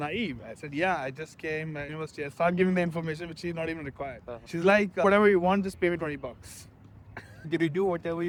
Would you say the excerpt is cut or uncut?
uncut